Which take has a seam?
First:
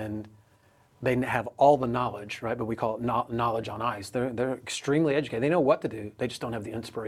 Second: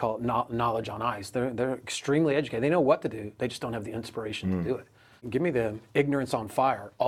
second; 1 cut; at 5.2 s

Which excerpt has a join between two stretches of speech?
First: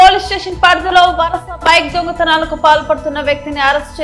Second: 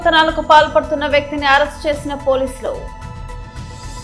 second; 1 cut; at 2.9 s

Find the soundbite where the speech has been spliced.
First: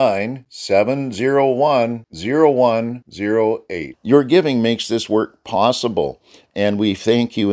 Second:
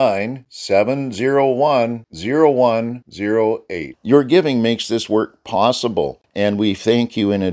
second; 1 cut; at 6.2 s

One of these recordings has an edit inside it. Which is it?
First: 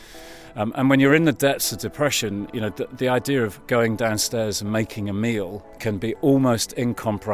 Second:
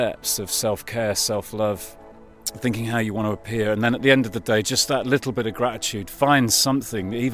first; 1 cut; at 5.6 s

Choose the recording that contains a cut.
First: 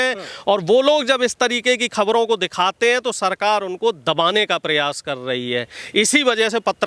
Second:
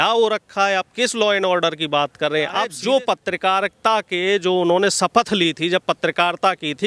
second; 1 cut; at 2.7 s

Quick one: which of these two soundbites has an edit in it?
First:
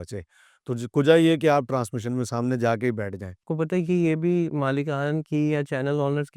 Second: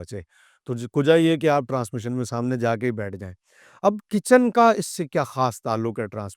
first; 1 cut; at 3.5 s

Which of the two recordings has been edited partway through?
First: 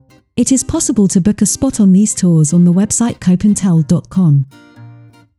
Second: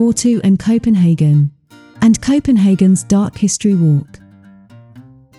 first; 1 cut; at 4.5 s

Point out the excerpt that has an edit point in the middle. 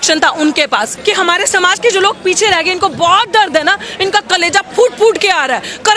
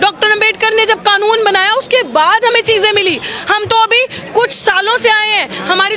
first; 1 cut; at 0.9 s

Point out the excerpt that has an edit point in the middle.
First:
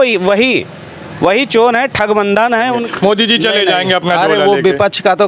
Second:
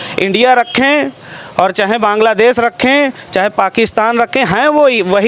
first; 1 cut; at 2.7 s

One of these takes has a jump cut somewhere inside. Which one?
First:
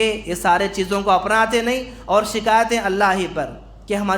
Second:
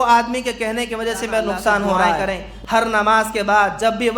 second; 1 cut; at 2.2 s

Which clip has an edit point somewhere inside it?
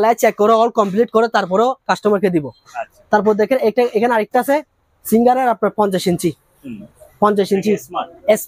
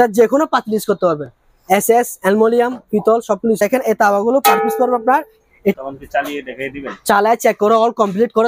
second; 2 cuts; at 3.6 s, 5.7 s

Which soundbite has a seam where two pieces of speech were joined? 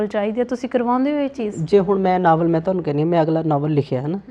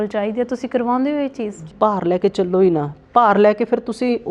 second; 1 cut; at 1.5 s

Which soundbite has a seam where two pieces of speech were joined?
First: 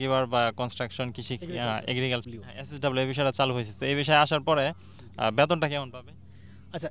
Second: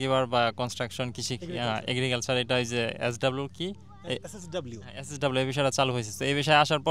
first; 1 cut; at 2.2 s

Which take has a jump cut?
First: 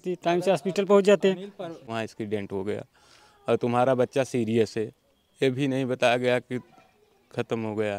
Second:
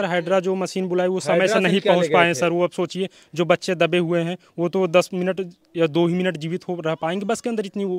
first; 1 cut; at 1.9 s

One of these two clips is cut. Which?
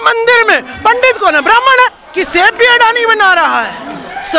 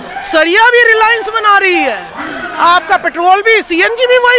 first; 1 cut; at 2.0 s

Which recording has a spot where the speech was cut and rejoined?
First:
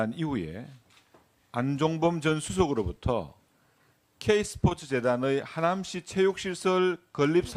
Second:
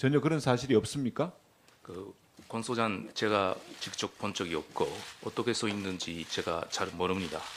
second; 1 cut; at 2.4 s

